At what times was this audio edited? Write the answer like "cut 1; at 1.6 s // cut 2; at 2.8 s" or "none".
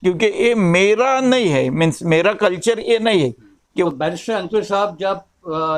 cut 1; at 3.9 s